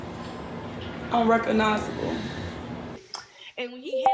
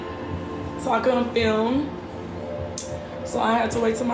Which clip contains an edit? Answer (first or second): first